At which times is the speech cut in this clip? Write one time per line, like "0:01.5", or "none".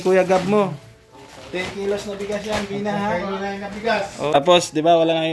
0:04.4